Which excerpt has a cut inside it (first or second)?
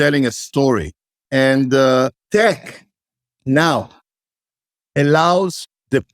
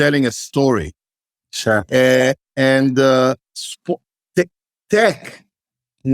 first